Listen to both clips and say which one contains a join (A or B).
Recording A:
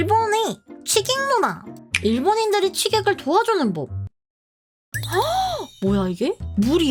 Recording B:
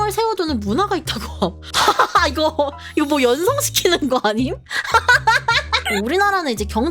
B